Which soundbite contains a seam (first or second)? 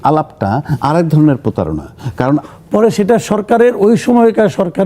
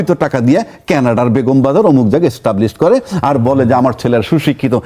first